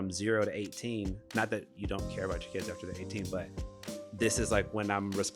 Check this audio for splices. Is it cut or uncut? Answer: uncut